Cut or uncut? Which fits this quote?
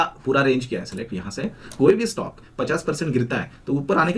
cut